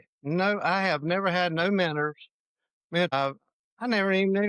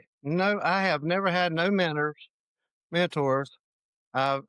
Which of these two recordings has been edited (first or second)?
first